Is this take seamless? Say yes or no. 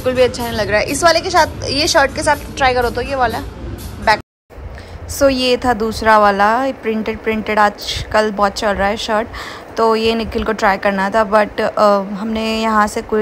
yes